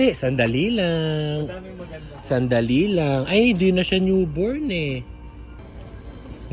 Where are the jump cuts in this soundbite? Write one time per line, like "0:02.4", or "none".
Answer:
0:05.6